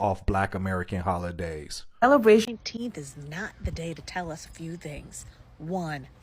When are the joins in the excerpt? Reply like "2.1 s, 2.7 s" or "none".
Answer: 2.4 s